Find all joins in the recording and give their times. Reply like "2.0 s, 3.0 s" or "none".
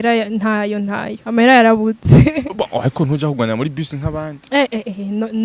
none